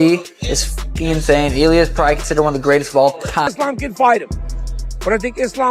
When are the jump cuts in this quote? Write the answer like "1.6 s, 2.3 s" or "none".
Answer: 3.5 s